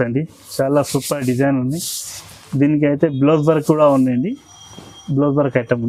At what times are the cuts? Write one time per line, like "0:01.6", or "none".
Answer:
none